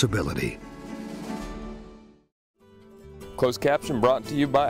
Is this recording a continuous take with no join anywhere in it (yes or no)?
no